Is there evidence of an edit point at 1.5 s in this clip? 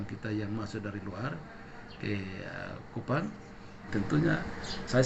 no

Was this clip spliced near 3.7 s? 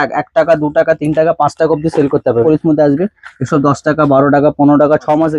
no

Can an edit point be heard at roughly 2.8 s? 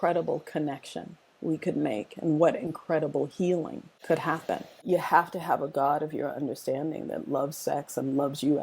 no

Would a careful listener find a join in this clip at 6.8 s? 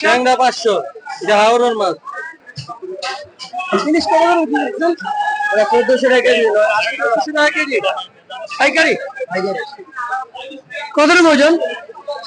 no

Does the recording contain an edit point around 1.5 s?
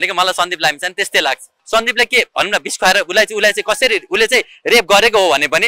yes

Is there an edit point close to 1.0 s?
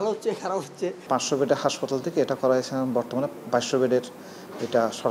yes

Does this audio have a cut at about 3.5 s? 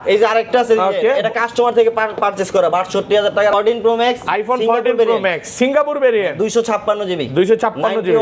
yes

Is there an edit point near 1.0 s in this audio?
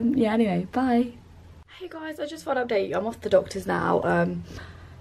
no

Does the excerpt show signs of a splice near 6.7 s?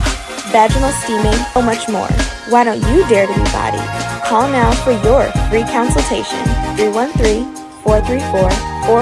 no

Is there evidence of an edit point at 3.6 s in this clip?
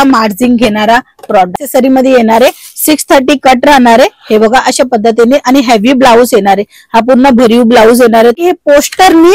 no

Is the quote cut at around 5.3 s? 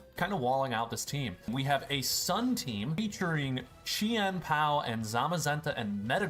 no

